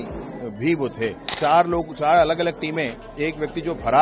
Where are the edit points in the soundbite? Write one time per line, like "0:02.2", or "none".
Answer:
0:01.2